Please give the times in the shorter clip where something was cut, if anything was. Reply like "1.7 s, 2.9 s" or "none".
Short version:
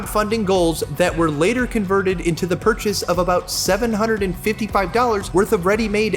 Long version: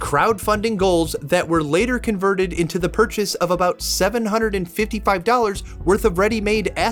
5.2 s